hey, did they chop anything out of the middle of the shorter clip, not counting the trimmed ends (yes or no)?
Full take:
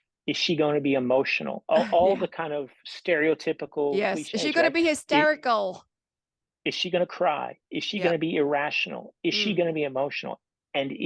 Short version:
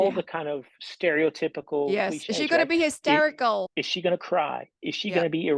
yes